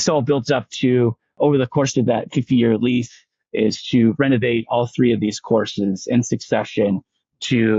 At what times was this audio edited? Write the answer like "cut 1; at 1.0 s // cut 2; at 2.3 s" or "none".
cut 1; at 1.3 s